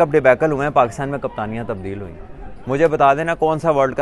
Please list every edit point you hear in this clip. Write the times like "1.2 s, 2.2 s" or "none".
none